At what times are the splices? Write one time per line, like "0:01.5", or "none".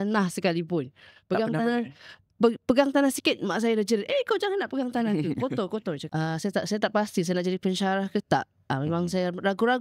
0:06.0